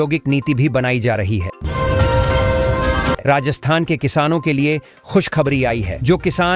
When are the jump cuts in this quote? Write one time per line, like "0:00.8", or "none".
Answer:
0:01.6
0:03.2